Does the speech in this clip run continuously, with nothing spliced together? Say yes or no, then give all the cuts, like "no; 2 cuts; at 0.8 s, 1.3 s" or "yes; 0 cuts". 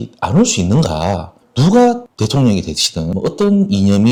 yes; 0 cuts